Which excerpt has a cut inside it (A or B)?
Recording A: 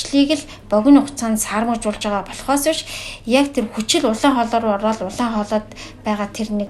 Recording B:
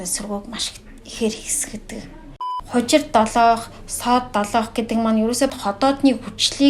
B